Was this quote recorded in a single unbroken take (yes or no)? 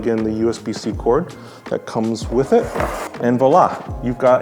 no